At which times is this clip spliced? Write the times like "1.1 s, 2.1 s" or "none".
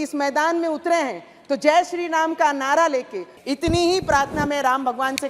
3.3 s